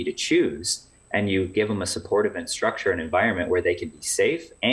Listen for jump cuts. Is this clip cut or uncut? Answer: uncut